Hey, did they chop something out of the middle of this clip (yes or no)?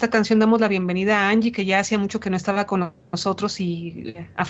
yes